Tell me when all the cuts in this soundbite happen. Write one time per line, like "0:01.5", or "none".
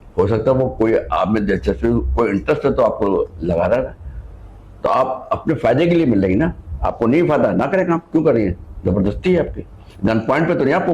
none